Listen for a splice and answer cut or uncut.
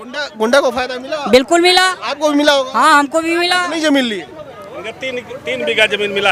uncut